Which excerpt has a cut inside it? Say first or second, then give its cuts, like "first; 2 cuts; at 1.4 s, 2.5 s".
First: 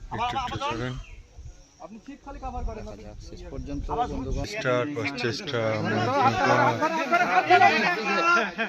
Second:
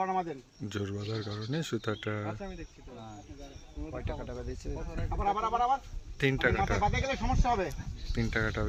first; 1 cut; at 4.4 s